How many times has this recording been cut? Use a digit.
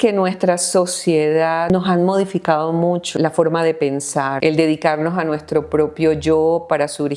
3